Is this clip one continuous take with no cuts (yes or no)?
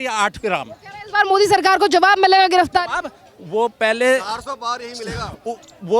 yes